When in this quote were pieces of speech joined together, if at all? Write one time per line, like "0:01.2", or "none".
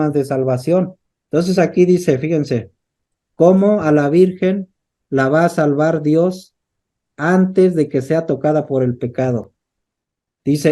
0:01.0